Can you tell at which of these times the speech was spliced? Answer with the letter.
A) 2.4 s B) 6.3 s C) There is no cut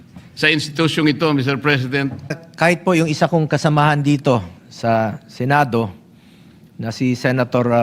A